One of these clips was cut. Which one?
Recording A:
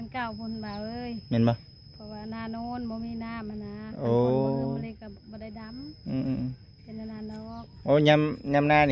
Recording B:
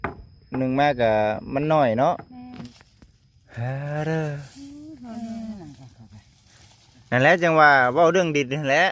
B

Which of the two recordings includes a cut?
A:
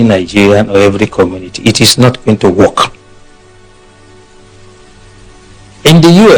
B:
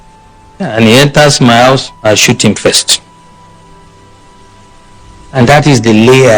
B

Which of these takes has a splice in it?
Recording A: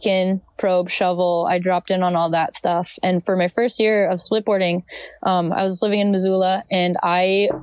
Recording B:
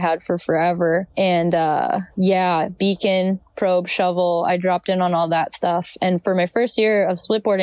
B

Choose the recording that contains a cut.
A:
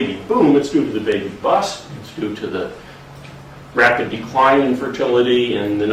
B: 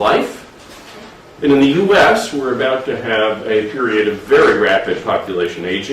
B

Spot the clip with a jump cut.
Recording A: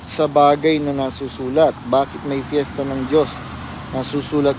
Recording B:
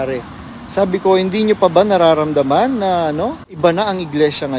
B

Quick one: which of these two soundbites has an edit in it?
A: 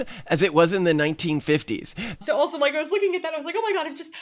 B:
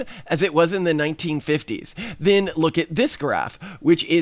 A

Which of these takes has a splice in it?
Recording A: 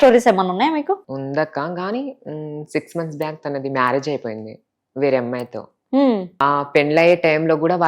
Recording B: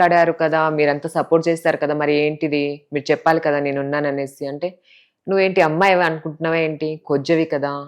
A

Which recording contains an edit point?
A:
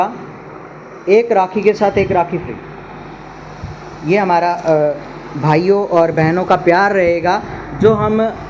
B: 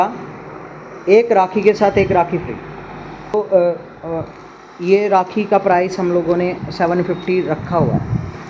B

